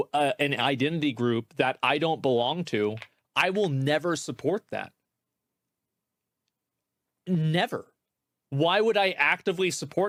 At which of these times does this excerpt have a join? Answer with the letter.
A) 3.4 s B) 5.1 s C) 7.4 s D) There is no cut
D